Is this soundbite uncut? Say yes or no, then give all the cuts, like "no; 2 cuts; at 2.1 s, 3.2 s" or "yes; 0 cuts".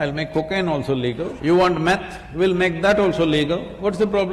no; 1 cut; at 1.3 s